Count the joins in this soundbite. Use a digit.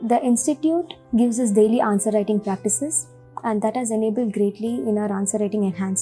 1